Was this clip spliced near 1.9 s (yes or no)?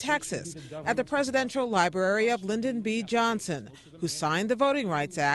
no